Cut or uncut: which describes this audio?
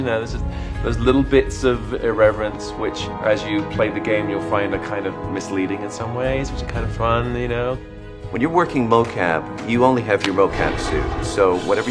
uncut